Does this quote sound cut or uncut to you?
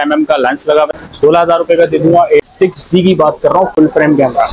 cut